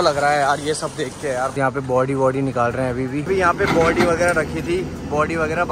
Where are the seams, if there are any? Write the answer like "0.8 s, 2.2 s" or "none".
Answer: 1.5 s, 3.3 s